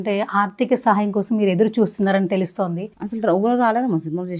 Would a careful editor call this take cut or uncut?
cut